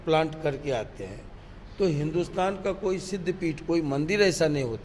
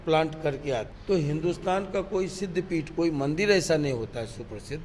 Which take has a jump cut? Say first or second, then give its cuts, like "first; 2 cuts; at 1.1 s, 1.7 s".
second; 1 cut; at 0.9 s